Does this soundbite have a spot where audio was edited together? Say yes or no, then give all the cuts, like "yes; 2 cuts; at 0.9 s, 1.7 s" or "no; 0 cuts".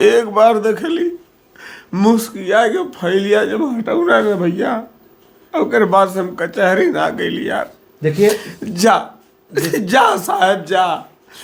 no; 0 cuts